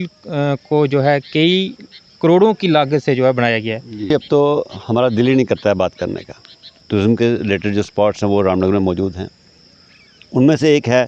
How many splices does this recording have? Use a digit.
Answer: 2